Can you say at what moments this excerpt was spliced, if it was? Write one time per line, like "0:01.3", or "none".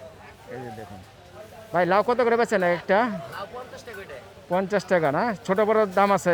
none